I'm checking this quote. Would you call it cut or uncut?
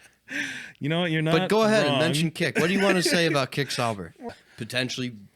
cut